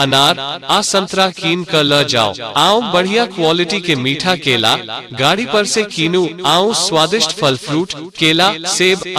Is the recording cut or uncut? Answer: cut